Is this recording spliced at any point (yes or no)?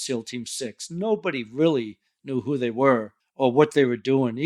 yes